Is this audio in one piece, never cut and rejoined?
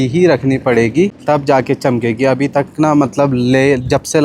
no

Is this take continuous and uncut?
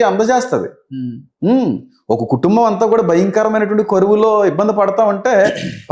yes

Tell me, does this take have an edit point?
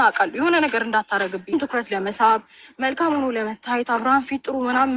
yes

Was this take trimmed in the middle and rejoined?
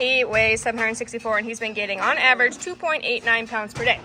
no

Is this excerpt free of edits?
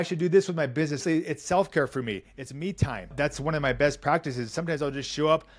no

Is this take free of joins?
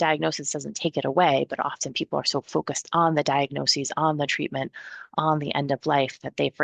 yes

